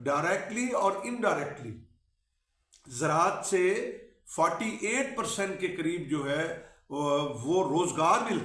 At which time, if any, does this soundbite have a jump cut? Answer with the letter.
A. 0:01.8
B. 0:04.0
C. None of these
C